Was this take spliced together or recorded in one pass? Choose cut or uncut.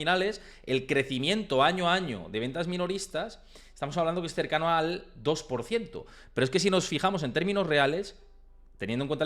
uncut